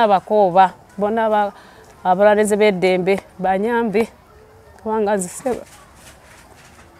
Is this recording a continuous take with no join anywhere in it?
yes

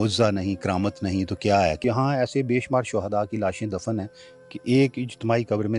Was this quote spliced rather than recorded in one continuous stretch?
yes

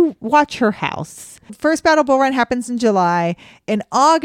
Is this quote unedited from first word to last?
no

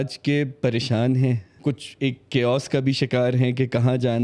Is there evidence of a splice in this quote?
yes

